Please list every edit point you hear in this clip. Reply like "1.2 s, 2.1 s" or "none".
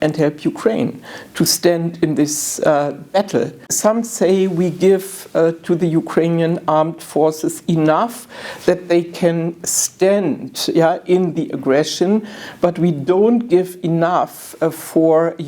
3.7 s